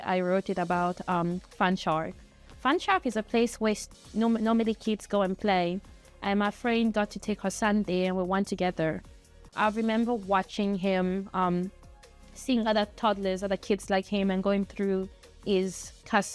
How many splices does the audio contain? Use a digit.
0